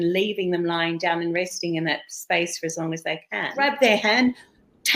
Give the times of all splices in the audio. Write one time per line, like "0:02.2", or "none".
0:03.5